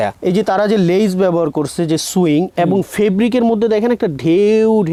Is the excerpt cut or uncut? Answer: uncut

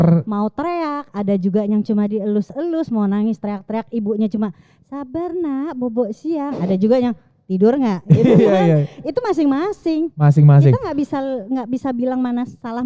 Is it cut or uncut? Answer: uncut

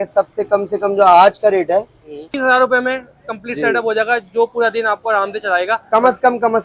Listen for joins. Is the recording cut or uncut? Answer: cut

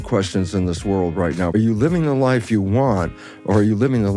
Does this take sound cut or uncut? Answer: cut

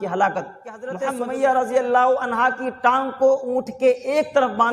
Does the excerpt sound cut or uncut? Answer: cut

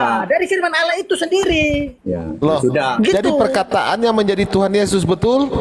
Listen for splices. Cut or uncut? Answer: cut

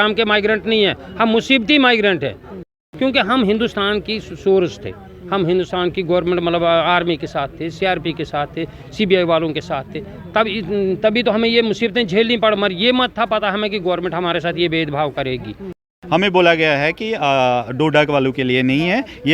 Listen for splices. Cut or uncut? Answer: cut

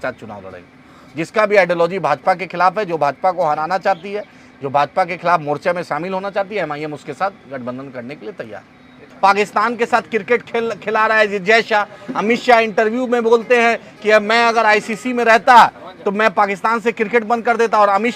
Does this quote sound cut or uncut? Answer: cut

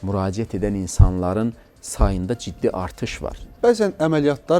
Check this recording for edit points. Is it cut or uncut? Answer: cut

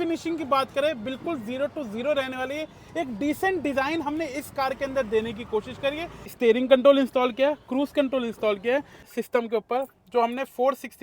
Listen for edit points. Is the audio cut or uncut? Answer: cut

